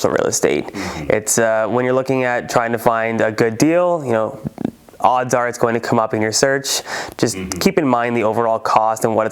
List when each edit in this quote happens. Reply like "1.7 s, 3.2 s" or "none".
none